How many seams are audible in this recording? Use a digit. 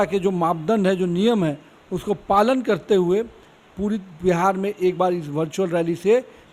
0